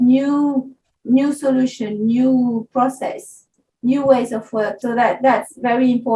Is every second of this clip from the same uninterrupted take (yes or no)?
no